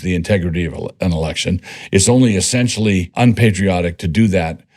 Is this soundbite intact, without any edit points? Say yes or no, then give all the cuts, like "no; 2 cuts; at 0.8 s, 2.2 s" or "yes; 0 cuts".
no; 1 cut; at 3.1 s